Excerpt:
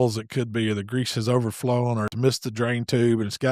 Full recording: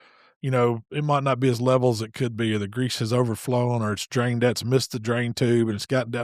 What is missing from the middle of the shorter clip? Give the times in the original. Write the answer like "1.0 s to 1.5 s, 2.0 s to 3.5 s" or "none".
4.0 s to 4.6 s